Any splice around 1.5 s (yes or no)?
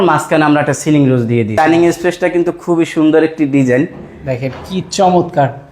yes